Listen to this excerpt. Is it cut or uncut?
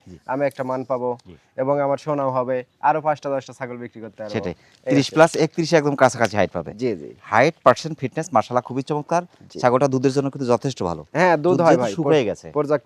uncut